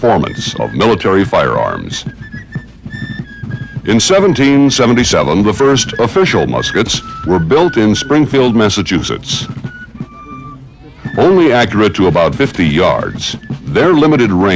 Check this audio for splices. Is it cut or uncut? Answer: cut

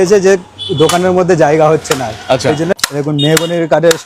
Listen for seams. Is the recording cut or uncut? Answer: cut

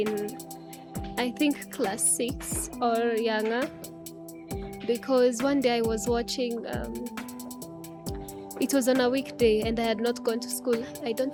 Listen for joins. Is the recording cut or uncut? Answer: uncut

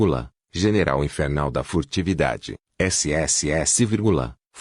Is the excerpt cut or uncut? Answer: cut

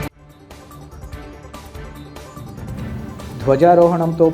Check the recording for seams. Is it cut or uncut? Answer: uncut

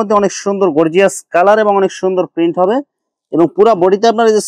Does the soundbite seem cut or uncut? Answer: uncut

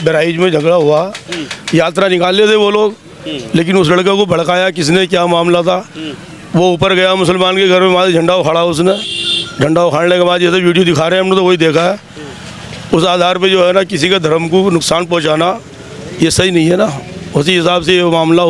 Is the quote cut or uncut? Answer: uncut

